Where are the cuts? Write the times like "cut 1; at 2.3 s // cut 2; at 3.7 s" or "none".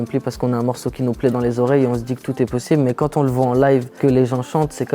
cut 1; at 3.9 s